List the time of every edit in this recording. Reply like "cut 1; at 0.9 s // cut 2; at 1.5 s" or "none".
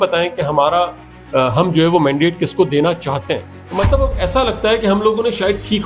cut 1; at 3.7 s